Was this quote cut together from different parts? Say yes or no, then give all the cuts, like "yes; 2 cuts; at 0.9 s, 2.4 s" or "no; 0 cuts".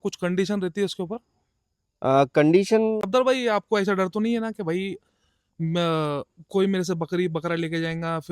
yes; 1 cut; at 3.0 s